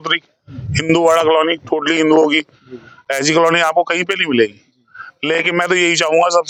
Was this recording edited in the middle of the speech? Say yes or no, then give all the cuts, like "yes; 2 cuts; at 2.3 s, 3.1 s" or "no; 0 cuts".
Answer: no; 0 cuts